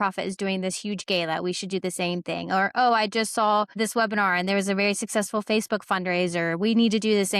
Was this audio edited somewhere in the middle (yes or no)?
yes